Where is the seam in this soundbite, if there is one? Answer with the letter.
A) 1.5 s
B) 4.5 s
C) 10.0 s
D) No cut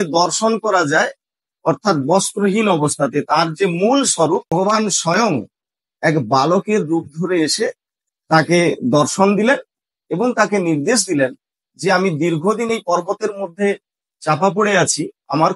B